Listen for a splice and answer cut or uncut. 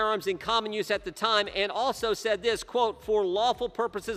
uncut